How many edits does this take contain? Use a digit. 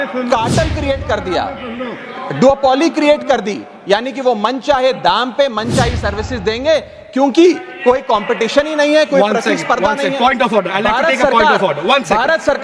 1